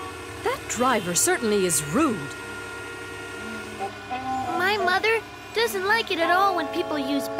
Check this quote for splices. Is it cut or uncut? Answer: cut